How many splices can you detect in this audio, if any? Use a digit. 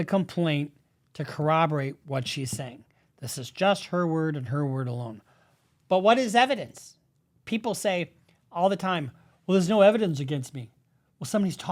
0